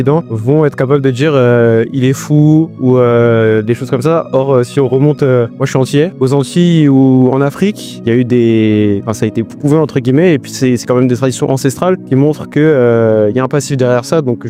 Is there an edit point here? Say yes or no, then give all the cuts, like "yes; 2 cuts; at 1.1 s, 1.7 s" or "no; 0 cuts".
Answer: no; 0 cuts